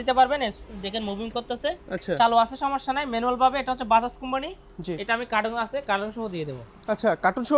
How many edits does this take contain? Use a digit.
0